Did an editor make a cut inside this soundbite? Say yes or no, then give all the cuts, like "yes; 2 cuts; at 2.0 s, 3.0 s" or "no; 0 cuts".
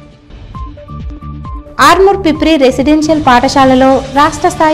yes; 1 cut; at 1.0 s